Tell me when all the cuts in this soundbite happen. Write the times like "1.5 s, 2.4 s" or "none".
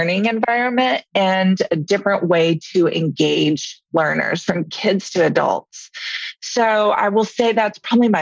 3.9 s